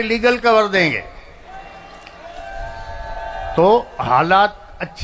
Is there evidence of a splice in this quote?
no; 0 cuts

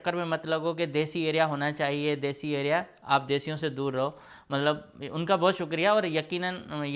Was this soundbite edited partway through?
no; 0 cuts

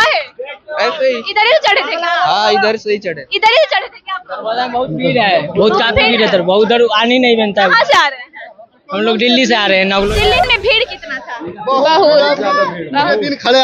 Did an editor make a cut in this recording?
yes; 1 cut; at 10.4 s

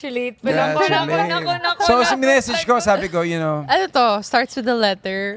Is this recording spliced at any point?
no; 0 cuts

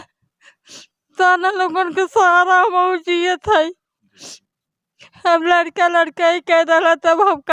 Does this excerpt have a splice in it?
no; 0 cuts

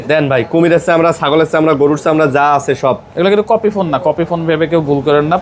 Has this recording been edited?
no; 0 cuts

